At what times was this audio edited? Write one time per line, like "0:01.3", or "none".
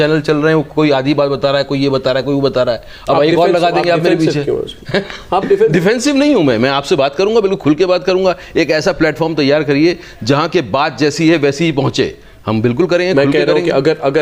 none

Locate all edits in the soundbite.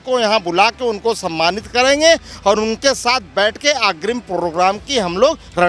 none

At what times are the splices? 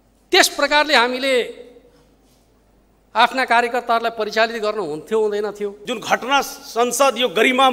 0:05.9

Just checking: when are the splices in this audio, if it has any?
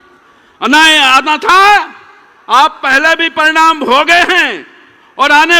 none

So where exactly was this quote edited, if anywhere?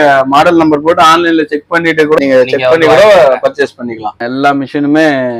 0:02.2
0:04.2

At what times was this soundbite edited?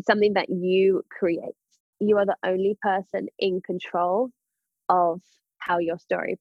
0:01.8

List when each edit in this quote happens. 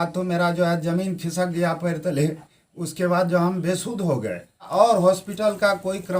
0:04.7

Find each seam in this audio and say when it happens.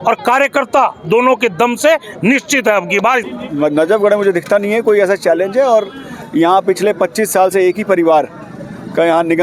0:03.2

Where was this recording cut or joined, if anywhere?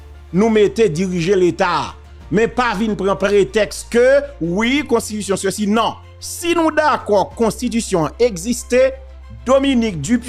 none

